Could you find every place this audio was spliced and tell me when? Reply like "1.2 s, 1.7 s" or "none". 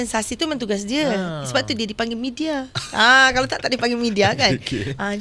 none